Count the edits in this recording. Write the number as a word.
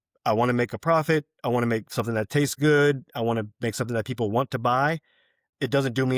zero